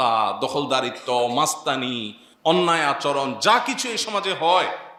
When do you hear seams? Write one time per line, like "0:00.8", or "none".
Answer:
none